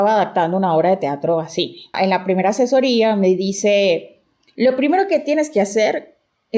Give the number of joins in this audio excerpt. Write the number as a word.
one